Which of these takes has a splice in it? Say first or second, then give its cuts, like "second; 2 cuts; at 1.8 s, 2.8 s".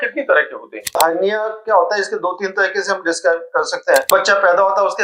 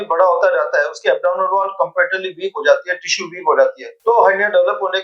first; 2 cuts; at 1.0 s, 4.1 s